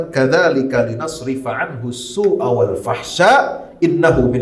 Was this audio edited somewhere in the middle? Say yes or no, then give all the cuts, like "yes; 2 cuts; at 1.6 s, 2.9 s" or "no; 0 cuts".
no; 0 cuts